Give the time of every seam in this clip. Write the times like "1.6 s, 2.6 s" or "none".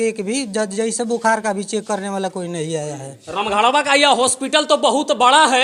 none

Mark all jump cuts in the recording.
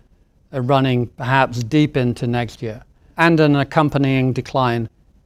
3.1 s

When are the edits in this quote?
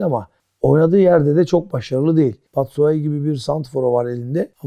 2.4 s

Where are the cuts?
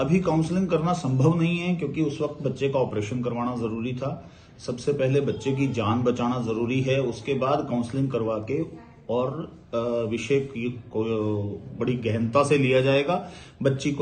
none

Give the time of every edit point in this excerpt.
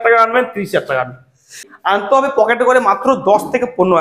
1.5 s

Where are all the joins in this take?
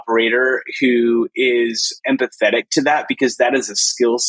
2.0 s

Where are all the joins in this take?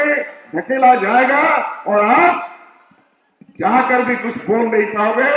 none

